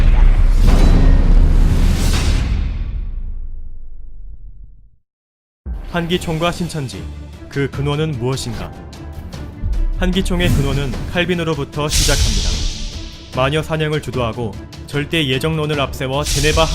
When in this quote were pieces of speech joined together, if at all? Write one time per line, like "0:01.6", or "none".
0:13.4